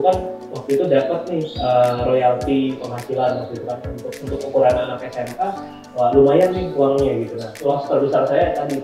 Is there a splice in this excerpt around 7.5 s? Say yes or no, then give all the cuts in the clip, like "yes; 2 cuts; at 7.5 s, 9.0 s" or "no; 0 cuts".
yes; 1 cut; at 7.5 s